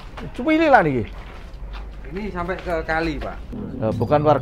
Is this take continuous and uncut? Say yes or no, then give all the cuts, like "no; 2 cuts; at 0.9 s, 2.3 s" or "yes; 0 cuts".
no; 1 cut; at 3.5 s